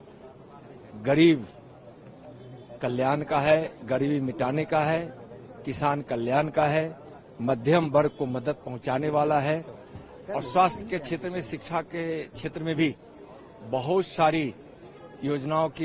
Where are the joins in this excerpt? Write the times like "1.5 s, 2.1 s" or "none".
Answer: none